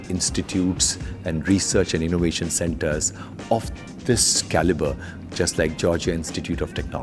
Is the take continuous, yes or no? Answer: yes